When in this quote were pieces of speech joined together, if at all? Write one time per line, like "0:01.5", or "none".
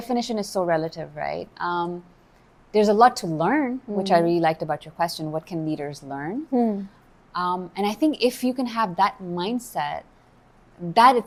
none